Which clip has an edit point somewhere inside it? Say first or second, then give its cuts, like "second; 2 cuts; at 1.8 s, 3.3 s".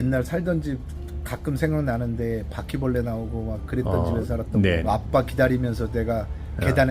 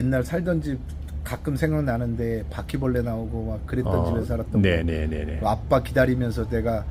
first; 1 cut; at 4.8 s